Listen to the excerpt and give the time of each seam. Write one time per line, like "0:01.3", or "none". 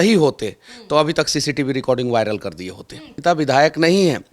0:03.2